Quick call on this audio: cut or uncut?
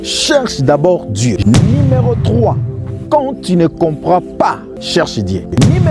cut